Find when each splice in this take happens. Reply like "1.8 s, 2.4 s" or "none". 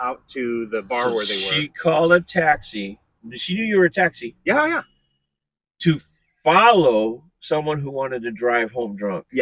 none